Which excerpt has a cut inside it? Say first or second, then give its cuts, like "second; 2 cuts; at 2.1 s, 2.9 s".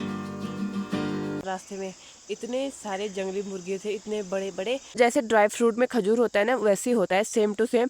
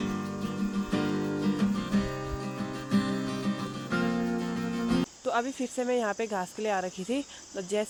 first; 2 cuts; at 1.5 s, 4.9 s